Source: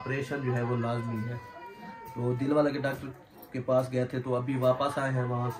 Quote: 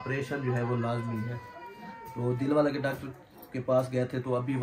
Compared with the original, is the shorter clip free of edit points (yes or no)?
yes